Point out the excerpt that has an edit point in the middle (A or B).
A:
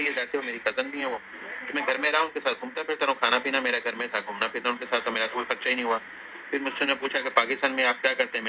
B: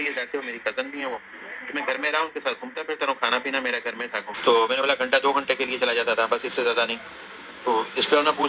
B